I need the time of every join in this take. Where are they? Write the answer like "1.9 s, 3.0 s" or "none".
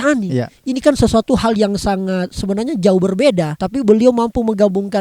3.6 s